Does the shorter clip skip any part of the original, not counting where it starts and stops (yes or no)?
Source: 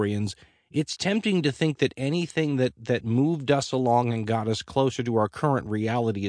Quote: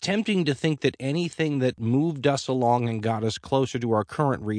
yes